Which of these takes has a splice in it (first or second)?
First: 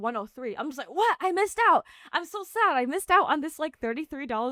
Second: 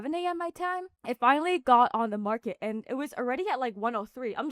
second